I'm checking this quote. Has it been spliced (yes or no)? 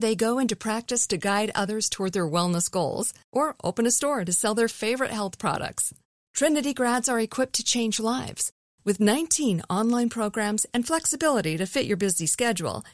no